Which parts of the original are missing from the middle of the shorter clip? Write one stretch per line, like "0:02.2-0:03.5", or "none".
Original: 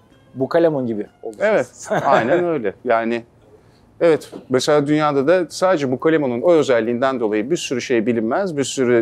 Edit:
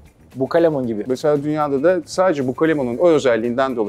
0:01.0-0:04.5